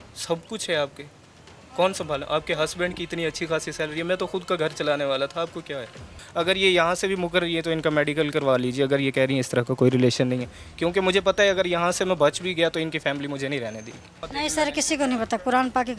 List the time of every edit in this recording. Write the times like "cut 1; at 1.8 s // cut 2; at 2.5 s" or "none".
cut 1; at 6.1 s // cut 2; at 14.2 s